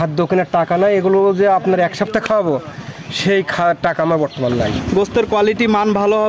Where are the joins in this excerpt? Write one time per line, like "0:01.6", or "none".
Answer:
0:04.8